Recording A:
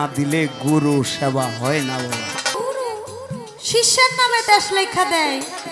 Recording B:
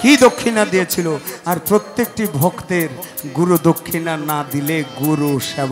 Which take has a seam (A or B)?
A